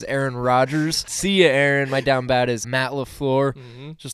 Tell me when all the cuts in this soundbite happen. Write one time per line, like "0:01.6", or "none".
0:01.1
0:02.7